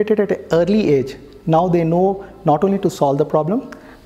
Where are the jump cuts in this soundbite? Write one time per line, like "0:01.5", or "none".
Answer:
none